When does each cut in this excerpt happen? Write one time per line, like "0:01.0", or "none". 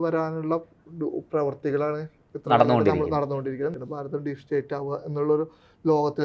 0:03.7